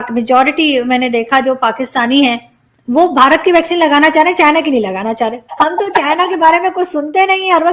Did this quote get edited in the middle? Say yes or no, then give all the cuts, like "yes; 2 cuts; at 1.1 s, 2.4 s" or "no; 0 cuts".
yes; 1 cut; at 5.4 s